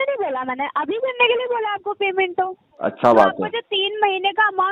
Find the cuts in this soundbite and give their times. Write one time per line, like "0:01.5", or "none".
0:02.7